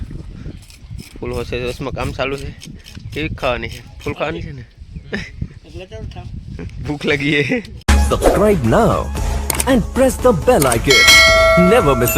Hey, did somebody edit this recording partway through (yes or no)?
yes